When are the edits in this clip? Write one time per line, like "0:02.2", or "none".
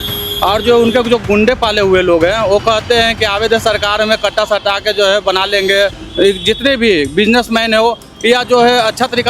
0:06.0